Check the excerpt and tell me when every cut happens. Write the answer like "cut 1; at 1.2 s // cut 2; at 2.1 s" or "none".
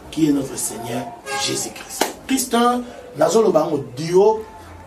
cut 1; at 2.2 s